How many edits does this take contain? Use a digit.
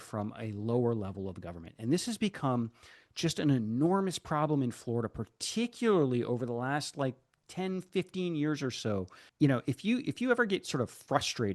1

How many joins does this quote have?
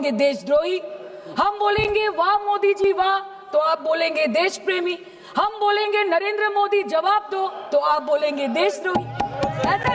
0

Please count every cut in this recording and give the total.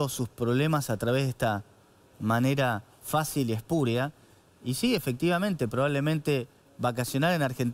0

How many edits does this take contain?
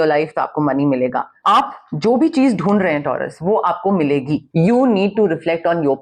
2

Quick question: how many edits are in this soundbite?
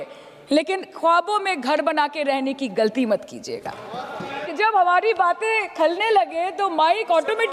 1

